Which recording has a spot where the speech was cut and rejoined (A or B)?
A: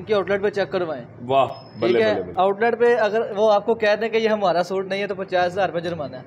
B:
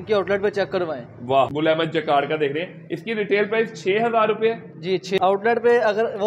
B